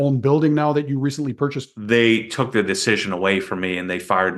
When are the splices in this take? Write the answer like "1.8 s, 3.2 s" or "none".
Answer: 1.7 s